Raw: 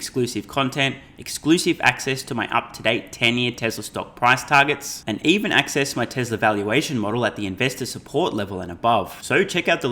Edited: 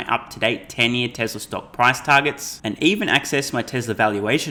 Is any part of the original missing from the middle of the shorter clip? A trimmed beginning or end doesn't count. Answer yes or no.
no